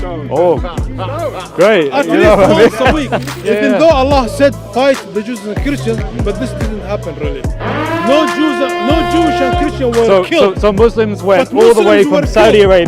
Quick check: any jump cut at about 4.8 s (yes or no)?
no